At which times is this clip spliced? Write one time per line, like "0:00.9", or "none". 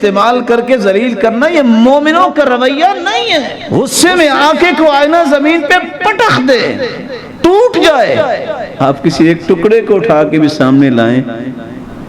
0:03.6